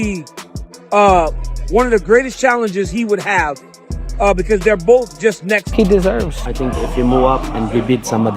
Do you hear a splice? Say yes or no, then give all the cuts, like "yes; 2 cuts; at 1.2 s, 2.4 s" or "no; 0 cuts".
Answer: yes; 1 cut; at 5.7 s